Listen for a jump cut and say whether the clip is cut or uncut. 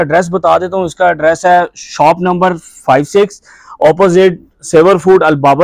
uncut